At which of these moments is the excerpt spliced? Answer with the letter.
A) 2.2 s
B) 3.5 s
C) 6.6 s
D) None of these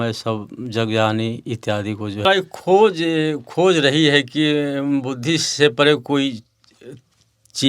A